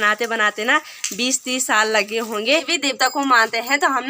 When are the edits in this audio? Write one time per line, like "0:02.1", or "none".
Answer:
0:02.7